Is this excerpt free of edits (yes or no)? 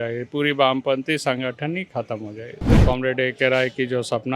no